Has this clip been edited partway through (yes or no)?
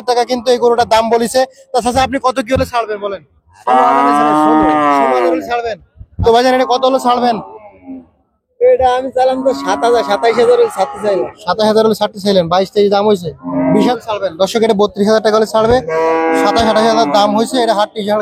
yes